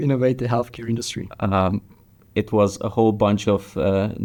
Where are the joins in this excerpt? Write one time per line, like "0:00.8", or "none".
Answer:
none